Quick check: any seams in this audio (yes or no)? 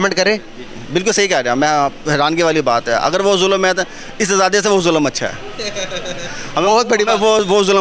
no